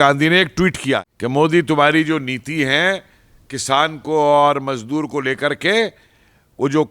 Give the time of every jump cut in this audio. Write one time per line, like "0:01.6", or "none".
0:01.1